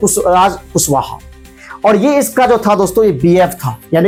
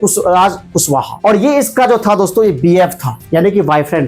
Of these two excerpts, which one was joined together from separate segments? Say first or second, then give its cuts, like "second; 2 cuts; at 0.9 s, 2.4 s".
second; 1 cut; at 1.1 s